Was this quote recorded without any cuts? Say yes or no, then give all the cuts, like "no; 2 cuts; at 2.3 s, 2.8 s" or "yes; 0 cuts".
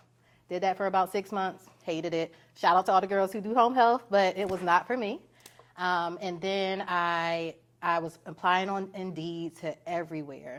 yes; 0 cuts